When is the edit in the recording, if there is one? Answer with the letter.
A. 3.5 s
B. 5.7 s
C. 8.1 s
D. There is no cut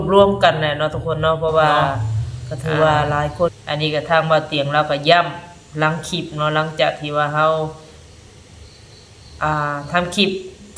A